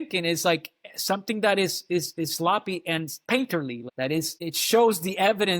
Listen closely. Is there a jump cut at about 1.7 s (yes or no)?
no